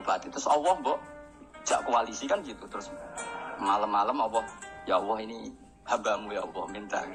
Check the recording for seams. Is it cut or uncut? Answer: uncut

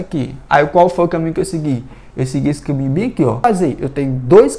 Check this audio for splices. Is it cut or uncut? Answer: cut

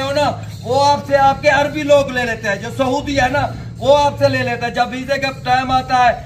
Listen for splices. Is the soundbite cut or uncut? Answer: uncut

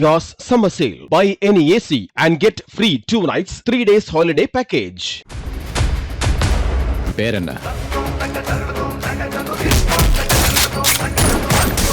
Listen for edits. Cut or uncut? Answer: uncut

